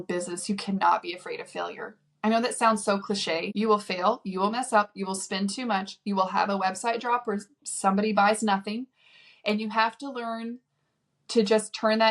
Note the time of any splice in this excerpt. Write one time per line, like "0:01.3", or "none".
0:03.5